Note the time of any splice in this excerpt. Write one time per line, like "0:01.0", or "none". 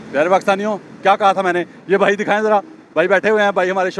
none